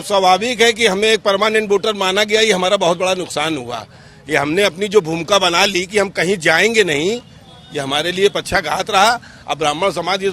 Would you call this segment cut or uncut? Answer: uncut